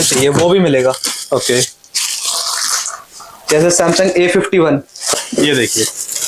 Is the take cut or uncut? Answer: cut